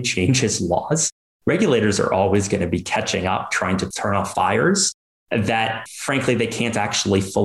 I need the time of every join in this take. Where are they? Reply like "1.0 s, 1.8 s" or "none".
none